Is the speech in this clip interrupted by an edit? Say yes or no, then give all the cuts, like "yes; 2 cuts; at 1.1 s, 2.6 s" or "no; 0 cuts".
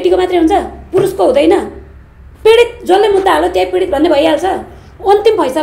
no; 0 cuts